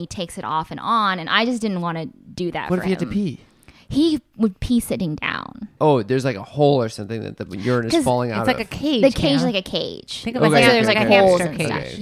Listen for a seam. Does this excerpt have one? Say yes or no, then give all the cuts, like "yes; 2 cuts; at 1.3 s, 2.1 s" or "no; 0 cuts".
yes; 1 cut; at 5.6 s